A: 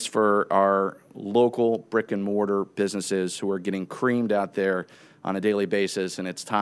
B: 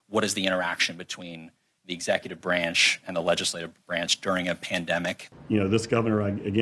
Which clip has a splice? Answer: B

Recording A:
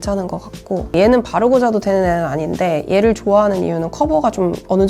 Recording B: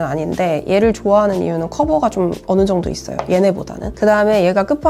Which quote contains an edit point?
A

